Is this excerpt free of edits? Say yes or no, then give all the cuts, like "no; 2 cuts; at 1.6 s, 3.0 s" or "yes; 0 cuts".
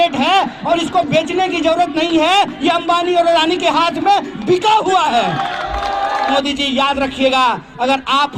no; 1 cut; at 6.2 s